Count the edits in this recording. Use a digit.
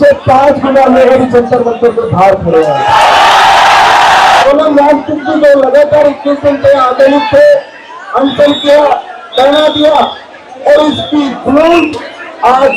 1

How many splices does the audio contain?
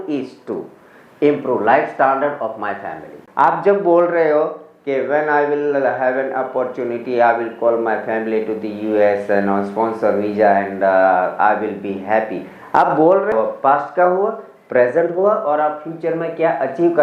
2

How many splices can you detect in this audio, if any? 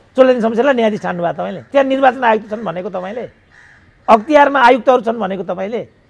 1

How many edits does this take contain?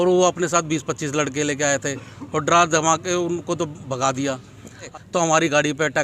1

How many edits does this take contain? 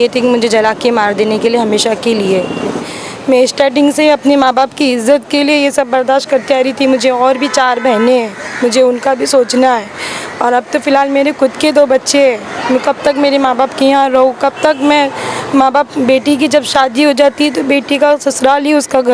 1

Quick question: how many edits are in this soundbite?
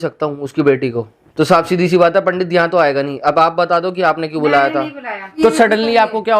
1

